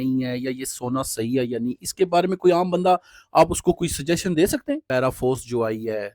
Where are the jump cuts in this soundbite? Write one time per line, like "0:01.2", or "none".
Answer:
0:04.8